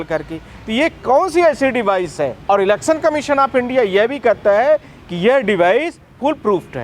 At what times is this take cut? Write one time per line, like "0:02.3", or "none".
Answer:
0:02.4

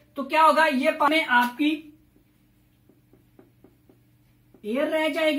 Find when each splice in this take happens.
0:01.1

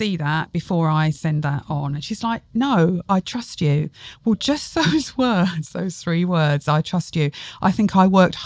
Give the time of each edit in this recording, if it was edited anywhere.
none

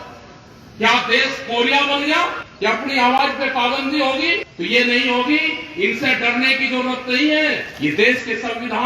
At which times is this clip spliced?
0:02.4
0:04.5
0:07.7

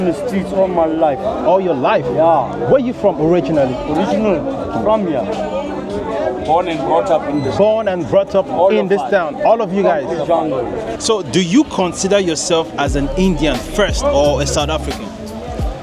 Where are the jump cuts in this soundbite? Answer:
none

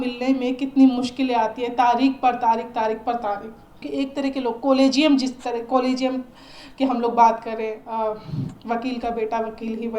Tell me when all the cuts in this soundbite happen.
0:03.9
0:07.8

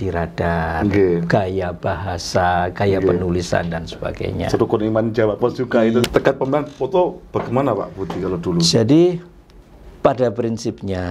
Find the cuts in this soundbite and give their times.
0:06.0

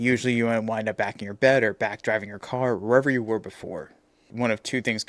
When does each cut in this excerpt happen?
0:04.2

